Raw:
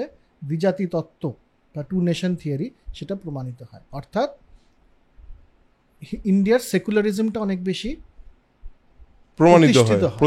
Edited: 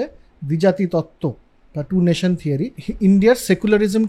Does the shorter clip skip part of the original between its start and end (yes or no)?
yes